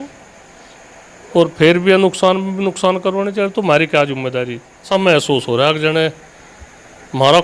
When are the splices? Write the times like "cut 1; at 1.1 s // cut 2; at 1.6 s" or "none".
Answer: cut 1; at 4.9 s